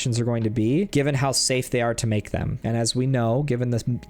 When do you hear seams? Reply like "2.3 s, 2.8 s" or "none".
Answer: 0.9 s, 2.5 s